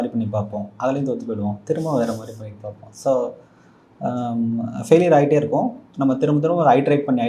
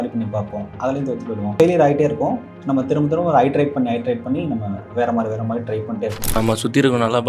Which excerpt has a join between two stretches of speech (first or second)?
second